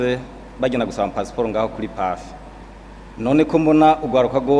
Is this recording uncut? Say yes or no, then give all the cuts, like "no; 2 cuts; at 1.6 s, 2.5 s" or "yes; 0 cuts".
yes; 0 cuts